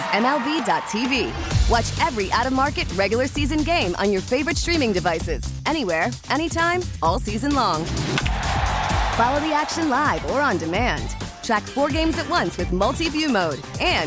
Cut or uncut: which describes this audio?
uncut